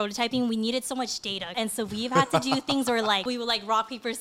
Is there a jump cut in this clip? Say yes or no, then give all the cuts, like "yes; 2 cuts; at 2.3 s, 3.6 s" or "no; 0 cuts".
yes; 2 cuts; at 1.5 s, 3.3 s